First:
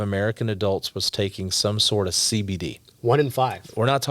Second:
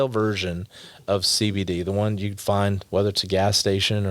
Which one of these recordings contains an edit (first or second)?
second